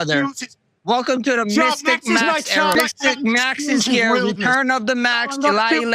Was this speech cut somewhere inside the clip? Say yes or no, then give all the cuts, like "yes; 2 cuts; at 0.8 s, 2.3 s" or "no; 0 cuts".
yes; 1 cut; at 2.8 s